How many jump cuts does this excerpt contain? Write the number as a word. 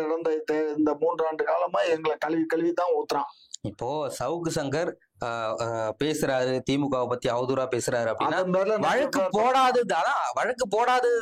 zero